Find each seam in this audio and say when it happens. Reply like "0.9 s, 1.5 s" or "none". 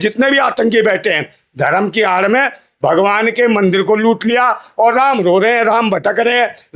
none